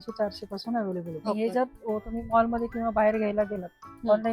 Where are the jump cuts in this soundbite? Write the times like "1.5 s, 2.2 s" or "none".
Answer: 1.2 s

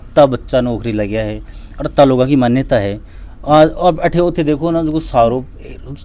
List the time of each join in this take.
none

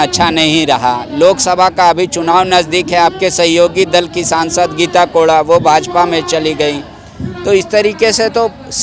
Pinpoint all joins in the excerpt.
none

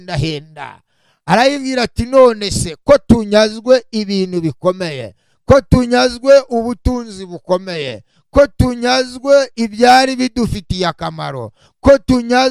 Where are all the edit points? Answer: none

